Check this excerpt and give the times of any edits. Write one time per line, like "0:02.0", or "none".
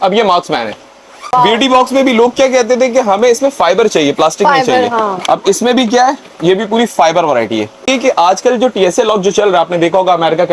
0:01.3
0:07.8